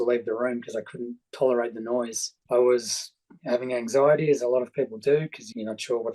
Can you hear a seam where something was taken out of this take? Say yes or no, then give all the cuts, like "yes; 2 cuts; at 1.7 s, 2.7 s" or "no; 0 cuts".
yes; 1 cut; at 2.3 s